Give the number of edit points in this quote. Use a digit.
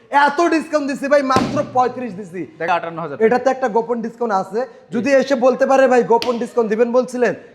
1